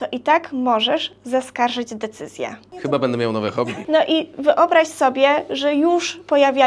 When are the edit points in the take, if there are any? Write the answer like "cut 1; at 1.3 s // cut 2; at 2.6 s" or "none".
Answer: cut 1; at 3.8 s

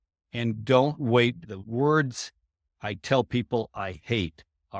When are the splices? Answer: cut 1; at 1.5 s

